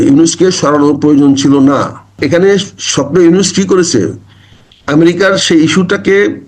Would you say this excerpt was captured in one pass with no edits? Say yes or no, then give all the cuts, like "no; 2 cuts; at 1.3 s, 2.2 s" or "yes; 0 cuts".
no; 1 cut; at 2.1 s